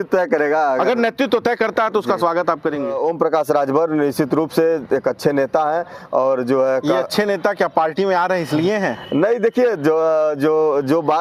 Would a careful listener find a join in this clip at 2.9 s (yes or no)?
yes